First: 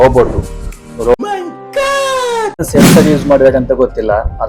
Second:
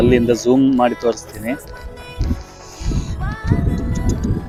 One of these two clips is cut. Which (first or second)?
first